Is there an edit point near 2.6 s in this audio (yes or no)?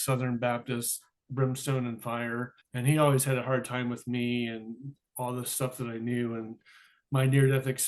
yes